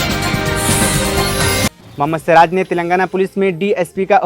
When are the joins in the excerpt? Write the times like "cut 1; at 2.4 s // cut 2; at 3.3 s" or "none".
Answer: cut 1; at 1.7 s